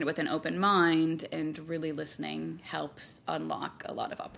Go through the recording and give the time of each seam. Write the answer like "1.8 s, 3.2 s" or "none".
none